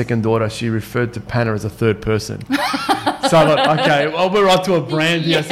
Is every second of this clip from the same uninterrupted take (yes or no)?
yes